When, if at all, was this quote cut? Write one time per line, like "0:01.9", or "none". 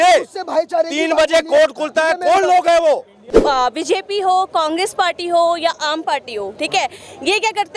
0:03.2